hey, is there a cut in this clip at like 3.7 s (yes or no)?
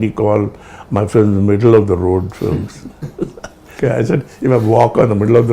yes